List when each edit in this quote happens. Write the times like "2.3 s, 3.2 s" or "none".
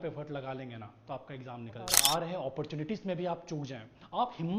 2.0 s

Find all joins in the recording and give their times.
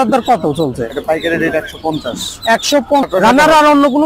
3.0 s

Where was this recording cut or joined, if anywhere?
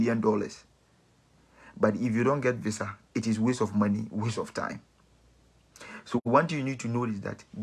none

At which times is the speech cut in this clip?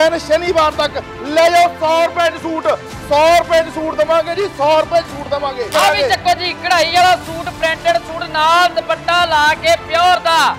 5.7 s

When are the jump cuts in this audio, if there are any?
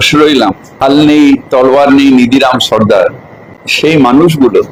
none

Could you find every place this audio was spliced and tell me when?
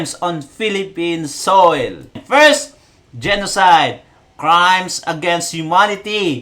2.2 s

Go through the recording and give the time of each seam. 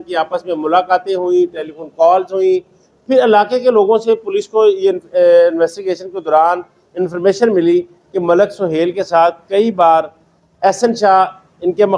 none

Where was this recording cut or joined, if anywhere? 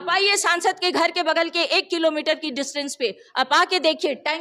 none

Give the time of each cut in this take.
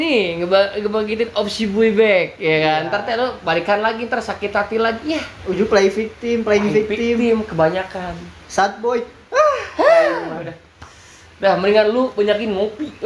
none

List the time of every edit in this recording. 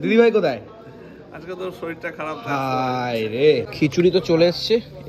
3.7 s

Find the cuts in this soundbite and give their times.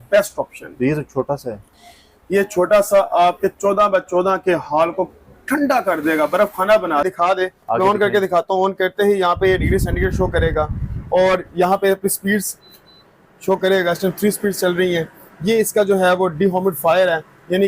7.0 s

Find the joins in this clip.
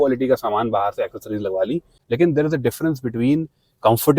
1.9 s

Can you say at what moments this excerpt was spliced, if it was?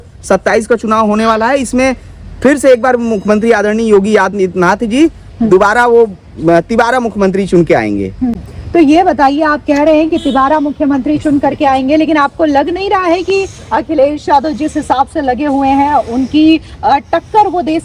none

